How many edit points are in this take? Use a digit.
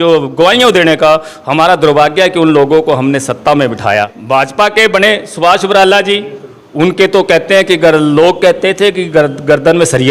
1